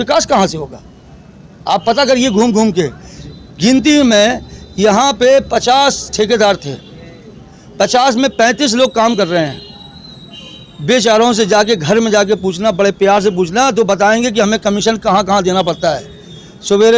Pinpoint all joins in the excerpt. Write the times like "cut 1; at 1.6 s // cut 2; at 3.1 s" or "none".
none